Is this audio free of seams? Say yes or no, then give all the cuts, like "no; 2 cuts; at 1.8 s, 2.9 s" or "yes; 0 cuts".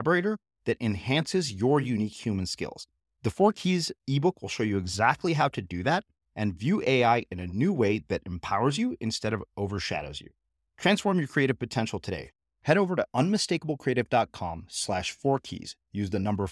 yes; 0 cuts